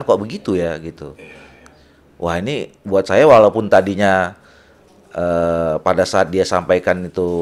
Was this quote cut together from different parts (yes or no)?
no